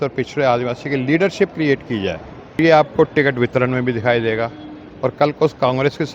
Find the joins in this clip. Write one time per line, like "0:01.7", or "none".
0:02.6